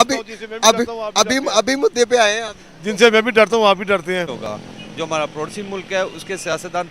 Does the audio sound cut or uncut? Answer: cut